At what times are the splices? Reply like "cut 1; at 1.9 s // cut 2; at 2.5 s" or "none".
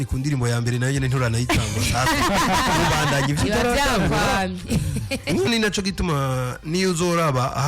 cut 1; at 5.5 s